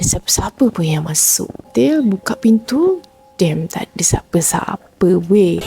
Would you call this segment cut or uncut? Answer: cut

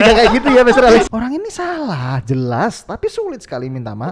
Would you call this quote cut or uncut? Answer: cut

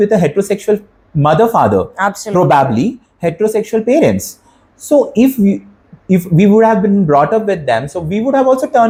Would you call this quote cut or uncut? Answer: uncut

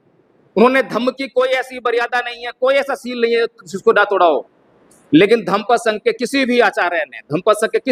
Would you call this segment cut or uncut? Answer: uncut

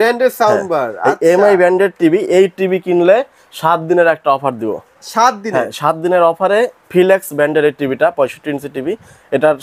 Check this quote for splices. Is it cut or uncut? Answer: uncut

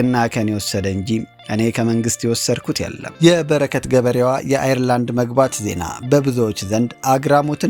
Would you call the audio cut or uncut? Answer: cut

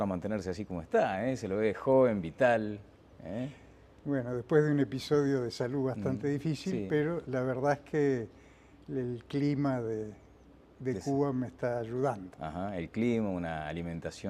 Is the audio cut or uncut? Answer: uncut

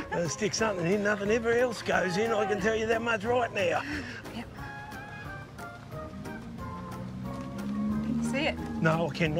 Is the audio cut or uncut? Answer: uncut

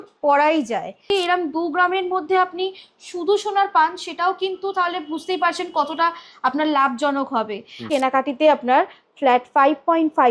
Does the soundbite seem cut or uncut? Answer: cut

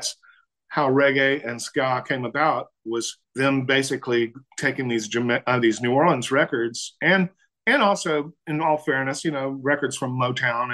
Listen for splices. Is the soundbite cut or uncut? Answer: cut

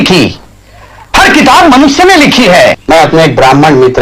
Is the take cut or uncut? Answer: cut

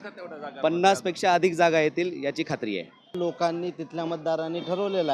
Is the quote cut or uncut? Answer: cut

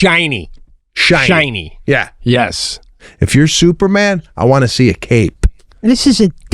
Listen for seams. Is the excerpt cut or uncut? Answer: cut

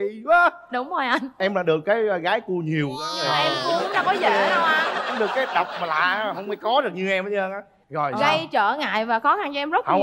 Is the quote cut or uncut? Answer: uncut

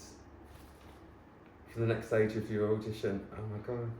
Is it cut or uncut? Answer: uncut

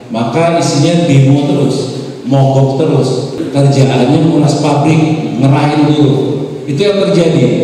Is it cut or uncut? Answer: cut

